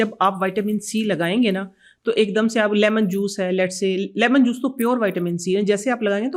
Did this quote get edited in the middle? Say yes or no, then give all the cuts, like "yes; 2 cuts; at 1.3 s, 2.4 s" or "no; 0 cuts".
no; 0 cuts